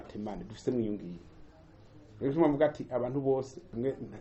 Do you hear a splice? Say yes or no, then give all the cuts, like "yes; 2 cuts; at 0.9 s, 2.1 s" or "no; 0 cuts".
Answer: no; 0 cuts